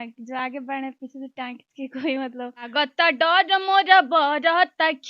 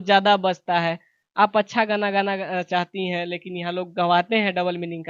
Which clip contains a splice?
first; 1 cut; at 2.7 s

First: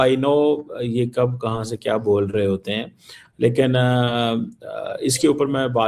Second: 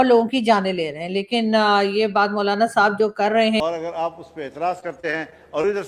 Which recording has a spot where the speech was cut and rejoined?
second; 1 cut; at 3.6 s

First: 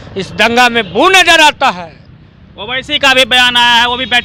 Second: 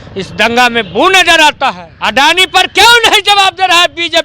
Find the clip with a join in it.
second; 1 cut; at 1.9 s

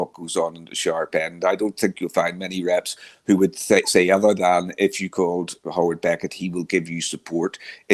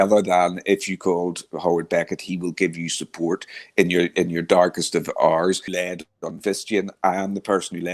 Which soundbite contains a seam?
second; 1 cut; at 5.7 s

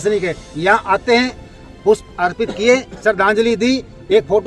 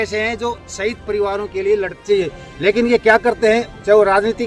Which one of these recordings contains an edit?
second; 1 cut; at 2.0 s

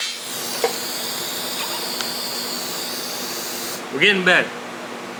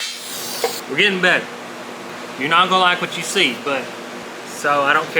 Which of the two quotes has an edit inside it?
second; 3 cuts; at 0.8 s, 2.1 s, 4.2 s

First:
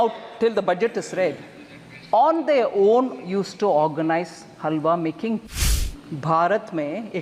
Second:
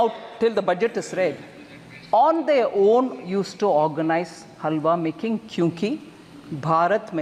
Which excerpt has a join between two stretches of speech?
first; 1 cut; at 5.5 s

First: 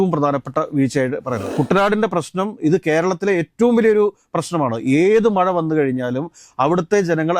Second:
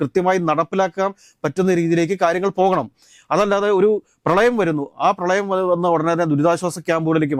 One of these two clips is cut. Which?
first; 1 cut; at 1.4 s

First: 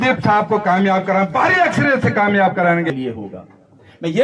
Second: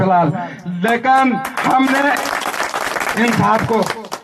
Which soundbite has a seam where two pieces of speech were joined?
first; 1 cut; at 2.9 s

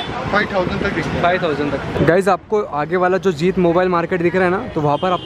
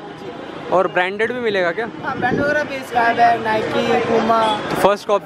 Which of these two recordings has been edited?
first; 1 cut; at 1.9 s

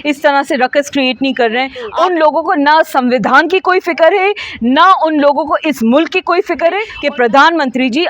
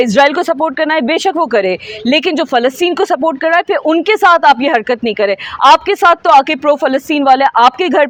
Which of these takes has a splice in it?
first; 2 cuts; at 1.8 s, 6.9 s

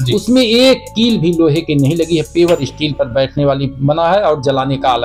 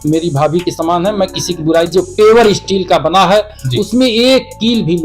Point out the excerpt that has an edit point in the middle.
second; 1 cut; at 1.9 s

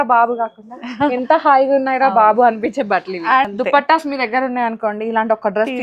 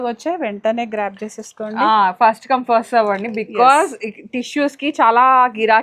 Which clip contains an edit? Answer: first; 1 cut; at 3.5 s

